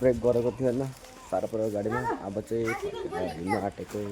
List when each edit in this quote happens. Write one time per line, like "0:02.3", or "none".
none